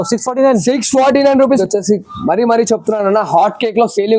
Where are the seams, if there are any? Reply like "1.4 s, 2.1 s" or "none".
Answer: 1.6 s